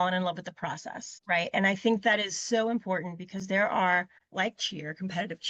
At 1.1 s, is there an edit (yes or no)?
yes